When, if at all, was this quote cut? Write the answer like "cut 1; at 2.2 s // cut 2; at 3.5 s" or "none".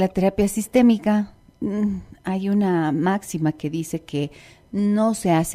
none